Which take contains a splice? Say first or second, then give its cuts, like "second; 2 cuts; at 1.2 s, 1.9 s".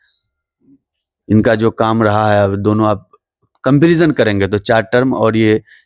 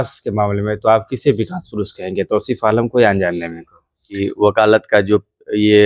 second; 1 cut; at 4.2 s